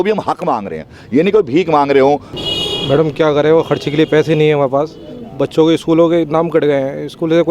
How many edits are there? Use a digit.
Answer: 1